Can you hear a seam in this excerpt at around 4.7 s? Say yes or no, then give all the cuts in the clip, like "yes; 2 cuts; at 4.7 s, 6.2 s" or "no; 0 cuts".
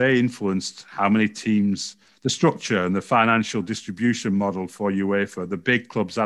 no; 0 cuts